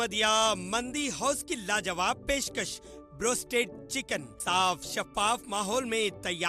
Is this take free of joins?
yes; 0 cuts

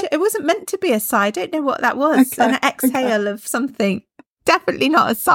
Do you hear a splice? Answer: no; 0 cuts

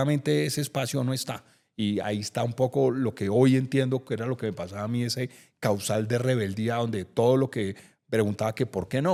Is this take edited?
no; 0 cuts

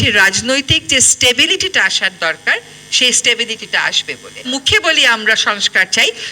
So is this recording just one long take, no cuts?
no; 1 cut; at 4.5 s

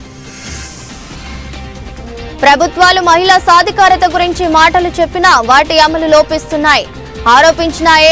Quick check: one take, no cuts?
no; 2 cuts; at 1.0 s, 2.4 s

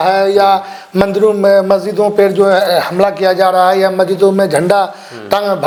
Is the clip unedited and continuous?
yes; 0 cuts

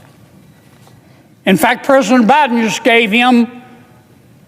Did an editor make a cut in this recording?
yes; 1 cut; at 1.0 s

